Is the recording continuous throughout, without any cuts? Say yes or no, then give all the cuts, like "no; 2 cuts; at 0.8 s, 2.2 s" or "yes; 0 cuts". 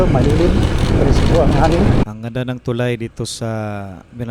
no; 2 cuts; at 0.9 s, 2.0 s